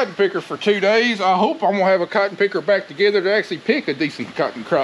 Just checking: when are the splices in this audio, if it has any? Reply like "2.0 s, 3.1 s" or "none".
none